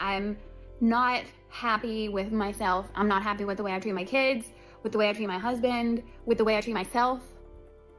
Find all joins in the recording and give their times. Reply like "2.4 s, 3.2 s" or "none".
none

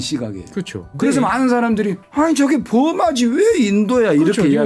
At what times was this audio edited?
0.9 s, 2.0 s

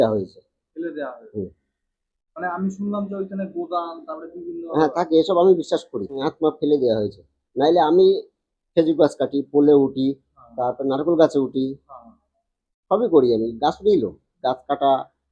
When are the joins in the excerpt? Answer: 6.3 s

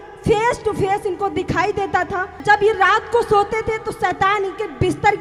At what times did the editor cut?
2.4 s

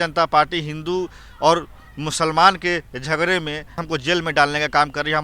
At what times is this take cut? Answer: 3.8 s

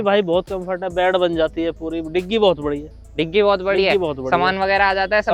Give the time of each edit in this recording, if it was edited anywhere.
none

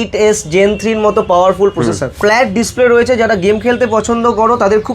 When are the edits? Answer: 2.1 s

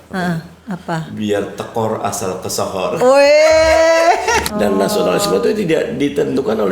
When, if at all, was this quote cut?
4.4 s

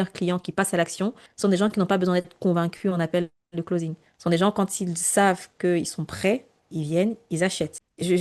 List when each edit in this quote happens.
none

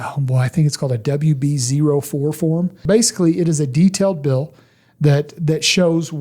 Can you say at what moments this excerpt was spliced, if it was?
2.8 s

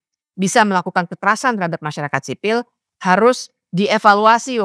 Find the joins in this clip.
none

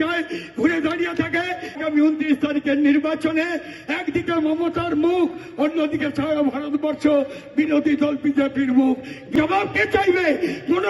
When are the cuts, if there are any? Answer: 1.8 s, 9.2 s

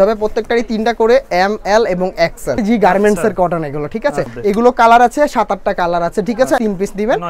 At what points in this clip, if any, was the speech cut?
2.6 s, 4.3 s, 6.6 s

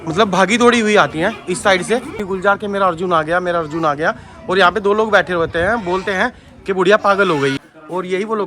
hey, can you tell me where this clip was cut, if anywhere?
2.2 s, 7.6 s

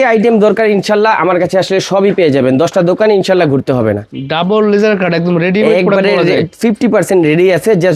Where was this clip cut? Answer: 4.1 s

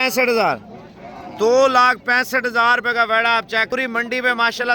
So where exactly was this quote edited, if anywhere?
3.7 s

